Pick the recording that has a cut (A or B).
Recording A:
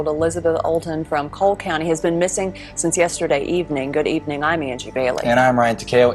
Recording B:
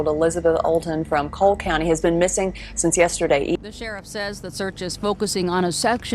B